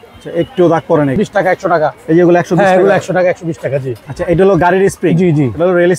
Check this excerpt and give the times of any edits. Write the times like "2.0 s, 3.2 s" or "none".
1.1 s, 4.0 s

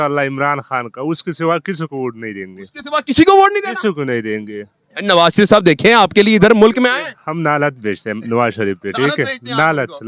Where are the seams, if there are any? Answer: none

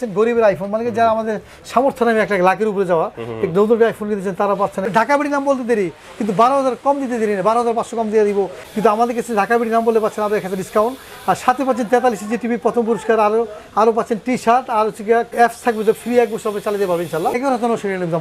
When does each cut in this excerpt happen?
4.9 s, 8.6 s, 15.3 s, 17.3 s

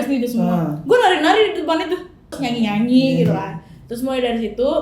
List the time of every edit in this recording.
2.4 s

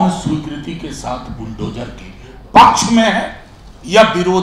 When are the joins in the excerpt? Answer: none

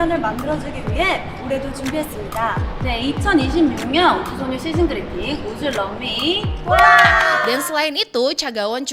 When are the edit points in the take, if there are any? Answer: 7.4 s

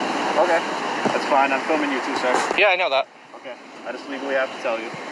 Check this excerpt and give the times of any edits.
none

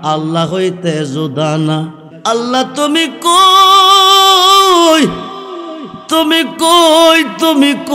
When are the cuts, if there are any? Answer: 2.1 s

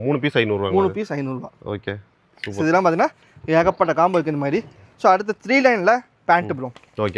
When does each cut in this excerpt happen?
none

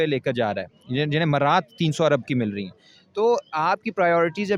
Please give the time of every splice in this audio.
none

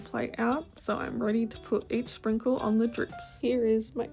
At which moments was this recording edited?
3.2 s

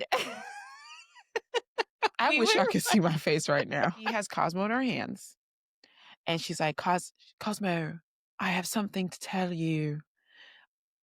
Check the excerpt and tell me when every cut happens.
4.1 s

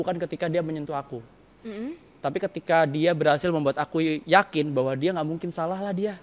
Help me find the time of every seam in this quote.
none

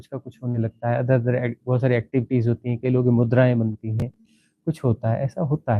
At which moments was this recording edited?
none

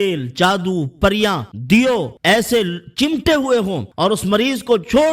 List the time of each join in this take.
1.5 s, 2.1 s, 3.8 s

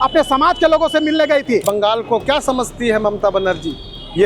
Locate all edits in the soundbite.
1.6 s

